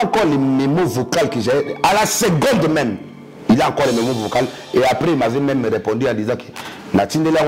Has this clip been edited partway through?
no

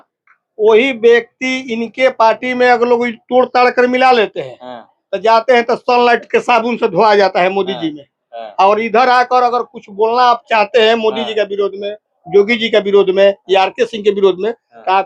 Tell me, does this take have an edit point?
no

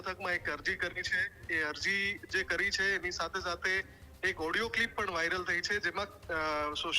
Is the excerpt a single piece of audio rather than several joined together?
yes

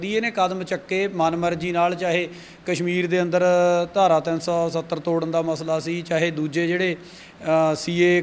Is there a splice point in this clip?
no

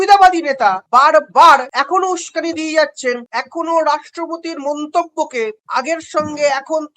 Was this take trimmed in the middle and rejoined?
yes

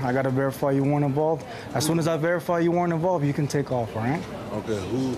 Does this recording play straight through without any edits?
yes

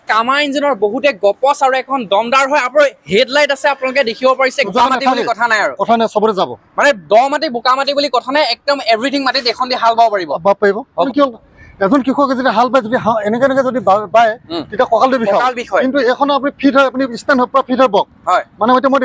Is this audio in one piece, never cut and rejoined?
no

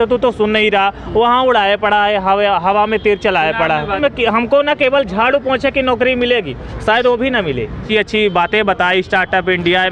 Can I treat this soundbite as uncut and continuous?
no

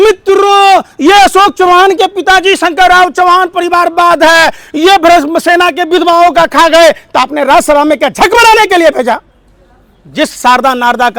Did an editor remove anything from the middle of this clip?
no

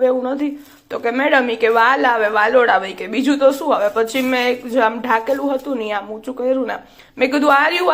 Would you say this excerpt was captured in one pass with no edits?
yes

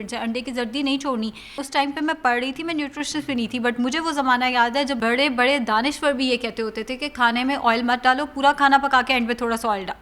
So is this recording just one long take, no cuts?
no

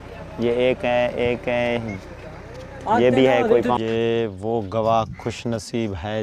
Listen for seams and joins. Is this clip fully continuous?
no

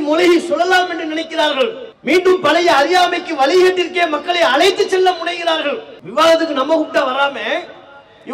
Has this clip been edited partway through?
yes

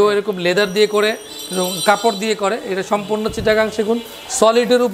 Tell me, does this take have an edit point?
no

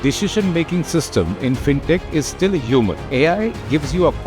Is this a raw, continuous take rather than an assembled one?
no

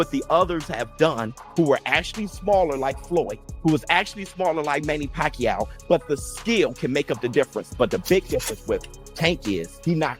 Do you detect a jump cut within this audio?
no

